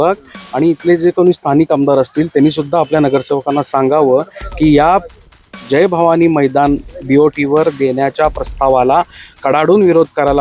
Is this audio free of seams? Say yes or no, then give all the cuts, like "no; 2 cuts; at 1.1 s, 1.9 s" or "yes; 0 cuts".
yes; 0 cuts